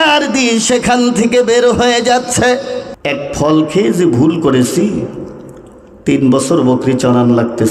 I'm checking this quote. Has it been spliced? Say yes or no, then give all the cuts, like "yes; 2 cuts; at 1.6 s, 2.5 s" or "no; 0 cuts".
yes; 1 cut; at 2.9 s